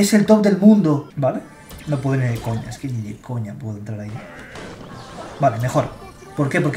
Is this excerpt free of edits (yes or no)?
no